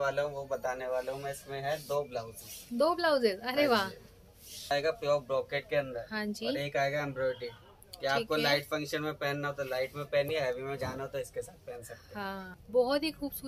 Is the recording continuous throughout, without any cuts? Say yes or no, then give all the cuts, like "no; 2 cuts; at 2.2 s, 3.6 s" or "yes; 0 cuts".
no; 2 cuts; at 4.7 s, 12.5 s